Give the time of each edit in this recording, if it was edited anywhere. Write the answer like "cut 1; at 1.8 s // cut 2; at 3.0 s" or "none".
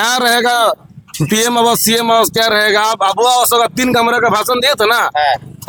none